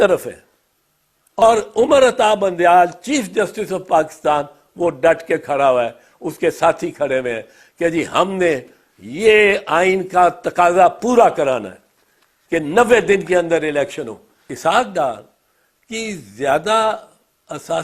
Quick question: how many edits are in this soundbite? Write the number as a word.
two